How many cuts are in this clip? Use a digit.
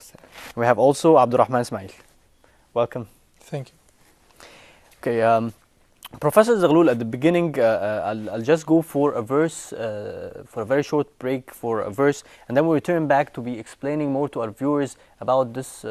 1